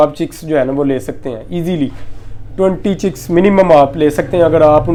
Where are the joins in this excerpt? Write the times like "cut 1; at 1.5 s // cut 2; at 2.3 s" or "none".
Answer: none